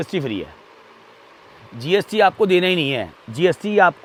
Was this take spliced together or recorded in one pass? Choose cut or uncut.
uncut